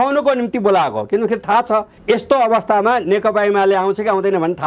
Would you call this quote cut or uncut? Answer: cut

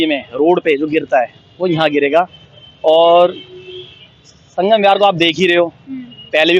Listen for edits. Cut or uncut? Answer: uncut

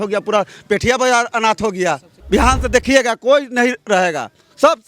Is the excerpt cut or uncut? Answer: cut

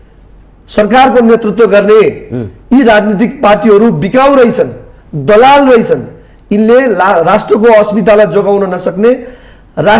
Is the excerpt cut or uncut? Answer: uncut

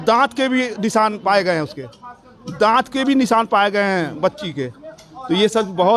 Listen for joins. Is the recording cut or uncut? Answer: uncut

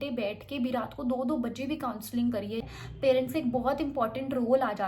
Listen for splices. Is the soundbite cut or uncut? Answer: cut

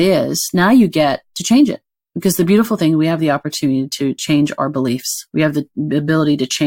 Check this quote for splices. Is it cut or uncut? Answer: cut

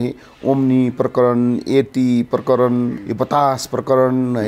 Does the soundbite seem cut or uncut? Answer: cut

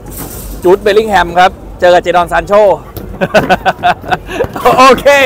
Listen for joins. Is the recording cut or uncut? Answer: uncut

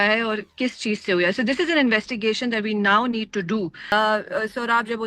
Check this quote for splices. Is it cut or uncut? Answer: cut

